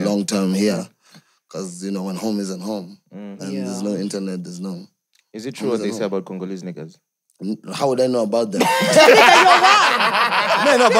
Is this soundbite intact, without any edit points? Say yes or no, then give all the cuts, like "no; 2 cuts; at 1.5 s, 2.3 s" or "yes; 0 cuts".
yes; 0 cuts